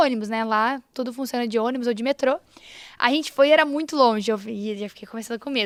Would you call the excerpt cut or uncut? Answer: uncut